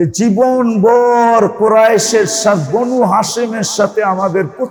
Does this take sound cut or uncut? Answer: uncut